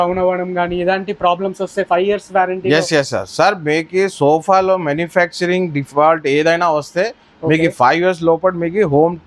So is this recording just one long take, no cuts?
yes; 0 cuts

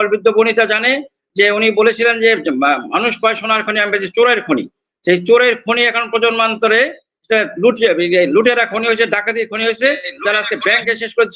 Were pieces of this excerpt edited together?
no; 0 cuts

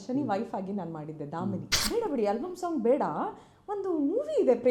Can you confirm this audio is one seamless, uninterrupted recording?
no; 1 cut; at 1.7 s

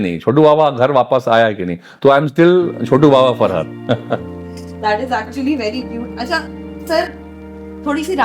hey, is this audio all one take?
yes; 0 cuts

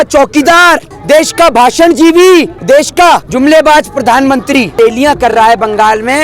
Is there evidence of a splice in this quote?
yes; 3 cuts; at 0.9 s, 3.0 s, 4.7 s

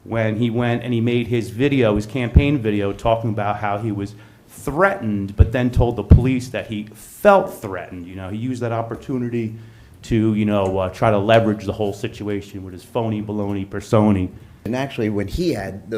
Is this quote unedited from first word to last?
no; 1 cut; at 14.7 s

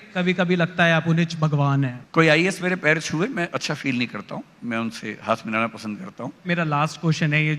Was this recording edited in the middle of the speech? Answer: yes; 2 cuts; at 2.0 s, 6.5 s

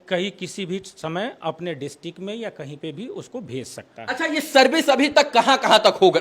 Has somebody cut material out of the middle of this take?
no; 0 cuts

